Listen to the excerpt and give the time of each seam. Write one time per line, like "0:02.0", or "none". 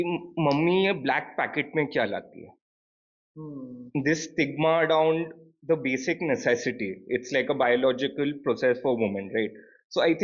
none